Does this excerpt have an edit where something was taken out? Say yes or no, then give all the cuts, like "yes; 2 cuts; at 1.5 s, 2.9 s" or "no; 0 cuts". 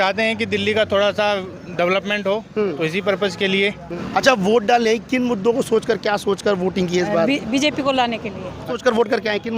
yes; 2 cuts; at 3.9 s, 8.7 s